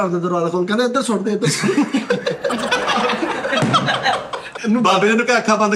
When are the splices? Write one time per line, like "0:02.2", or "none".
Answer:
0:04.4